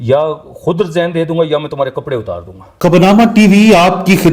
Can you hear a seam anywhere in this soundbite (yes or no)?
yes